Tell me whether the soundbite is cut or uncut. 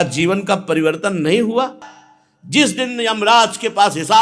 cut